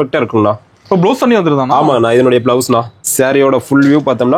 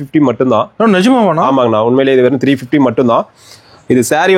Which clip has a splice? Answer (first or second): first